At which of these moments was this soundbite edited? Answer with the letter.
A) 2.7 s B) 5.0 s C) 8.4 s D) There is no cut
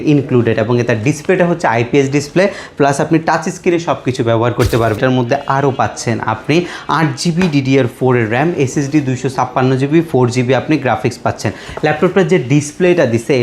B